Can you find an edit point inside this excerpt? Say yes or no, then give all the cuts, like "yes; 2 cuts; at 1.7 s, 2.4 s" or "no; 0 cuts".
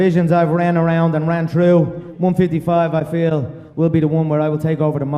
yes; 1 cut; at 1.1 s